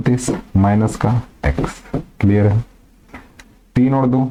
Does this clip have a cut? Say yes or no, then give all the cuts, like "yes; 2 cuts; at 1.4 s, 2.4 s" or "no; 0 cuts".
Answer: no; 0 cuts